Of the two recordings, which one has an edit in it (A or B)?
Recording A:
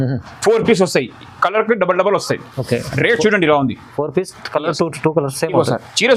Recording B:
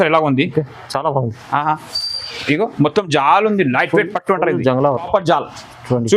B